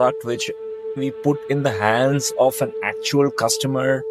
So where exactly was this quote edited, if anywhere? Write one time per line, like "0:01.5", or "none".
none